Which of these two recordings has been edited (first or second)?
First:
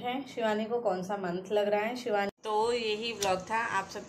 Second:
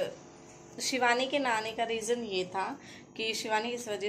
first